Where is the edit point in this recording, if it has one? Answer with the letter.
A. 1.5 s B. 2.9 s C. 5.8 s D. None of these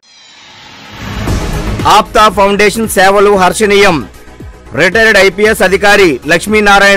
A